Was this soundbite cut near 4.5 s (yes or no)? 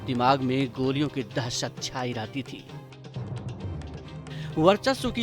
yes